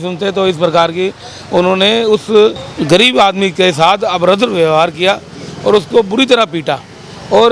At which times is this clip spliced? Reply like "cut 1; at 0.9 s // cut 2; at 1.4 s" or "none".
none